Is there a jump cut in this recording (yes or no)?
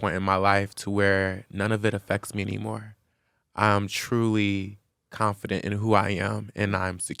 no